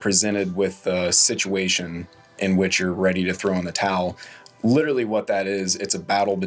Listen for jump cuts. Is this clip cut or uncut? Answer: uncut